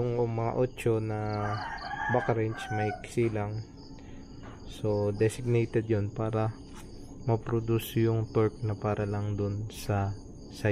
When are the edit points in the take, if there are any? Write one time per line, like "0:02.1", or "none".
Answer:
none